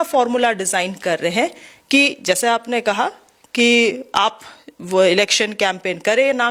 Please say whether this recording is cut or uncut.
uncut